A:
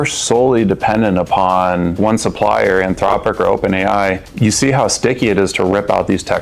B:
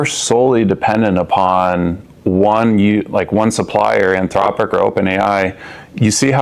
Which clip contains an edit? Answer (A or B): A